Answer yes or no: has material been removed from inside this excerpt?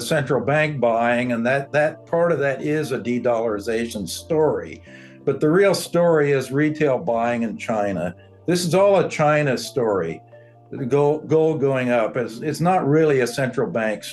no